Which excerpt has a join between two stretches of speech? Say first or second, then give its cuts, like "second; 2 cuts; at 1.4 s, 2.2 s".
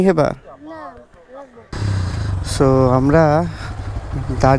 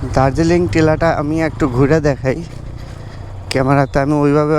first; 1 cut; at 1.7 s